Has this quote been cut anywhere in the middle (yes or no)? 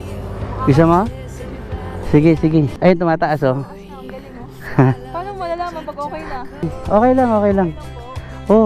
yes